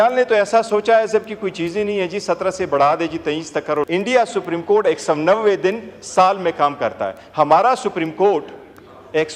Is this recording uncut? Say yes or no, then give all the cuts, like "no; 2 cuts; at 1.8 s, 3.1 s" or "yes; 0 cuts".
no; 1 cut; at 3.9 s